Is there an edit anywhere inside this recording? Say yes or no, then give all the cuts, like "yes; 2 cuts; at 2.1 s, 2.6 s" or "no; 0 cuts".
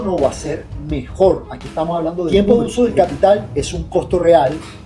yes; 1 cut; at 2.3 s